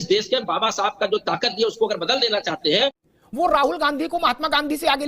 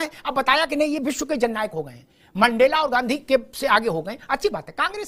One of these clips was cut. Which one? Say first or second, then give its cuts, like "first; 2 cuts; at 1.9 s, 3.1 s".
first; 1 cut; at 3.0 s